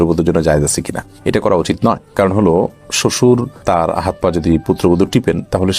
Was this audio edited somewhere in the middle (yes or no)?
no